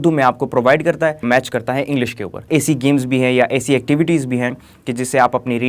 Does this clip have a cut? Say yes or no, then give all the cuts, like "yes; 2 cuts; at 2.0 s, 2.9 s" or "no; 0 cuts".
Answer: yes; 2 cuts; at 1.2 s, 2.4 s